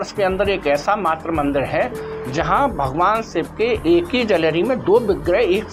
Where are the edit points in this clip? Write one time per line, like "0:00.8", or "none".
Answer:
none